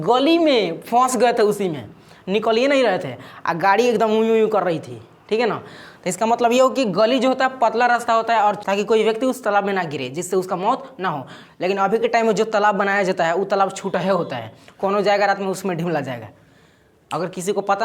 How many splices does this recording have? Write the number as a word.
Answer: one